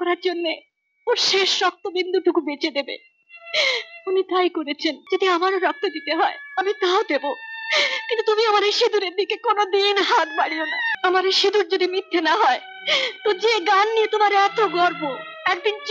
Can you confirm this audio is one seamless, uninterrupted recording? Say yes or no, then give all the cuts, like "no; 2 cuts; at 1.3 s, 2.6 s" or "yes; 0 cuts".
no; 2 cuts; at 5.0 s, 10.8 s